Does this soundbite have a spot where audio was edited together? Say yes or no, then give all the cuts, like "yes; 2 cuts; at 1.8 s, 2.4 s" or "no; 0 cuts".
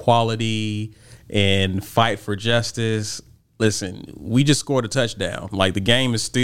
no; 0 cuts